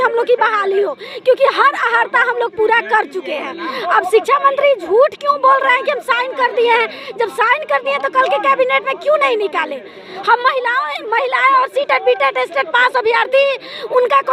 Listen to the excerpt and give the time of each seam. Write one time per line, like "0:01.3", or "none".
none